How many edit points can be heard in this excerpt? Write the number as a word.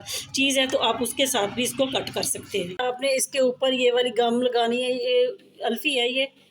one